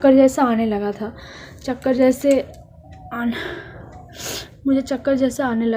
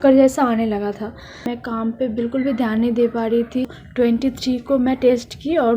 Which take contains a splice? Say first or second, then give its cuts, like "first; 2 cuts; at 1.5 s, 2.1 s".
second; 2 cuts; at 1.5 s, 3.8 s